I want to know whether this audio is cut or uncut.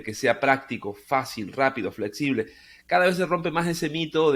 uncut